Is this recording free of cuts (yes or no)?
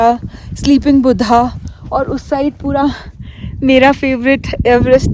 yes